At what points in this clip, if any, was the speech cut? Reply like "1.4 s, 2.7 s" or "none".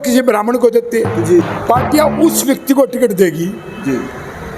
1.5 s